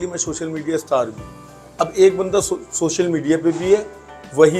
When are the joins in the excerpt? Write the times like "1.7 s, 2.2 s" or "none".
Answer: none